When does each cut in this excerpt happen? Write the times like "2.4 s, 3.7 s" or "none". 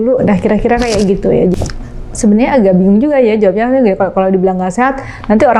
1.5 s